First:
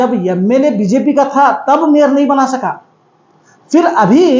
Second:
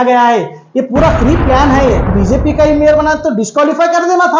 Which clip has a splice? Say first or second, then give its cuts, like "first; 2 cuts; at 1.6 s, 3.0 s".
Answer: second; 1 cut; at 2.1 s